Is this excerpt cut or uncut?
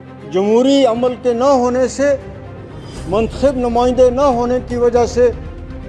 uncut